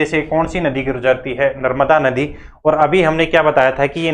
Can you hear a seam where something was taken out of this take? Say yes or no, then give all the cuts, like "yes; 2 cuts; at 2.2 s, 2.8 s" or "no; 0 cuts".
no; 0 cuts